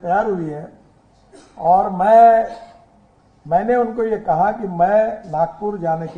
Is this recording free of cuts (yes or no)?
yes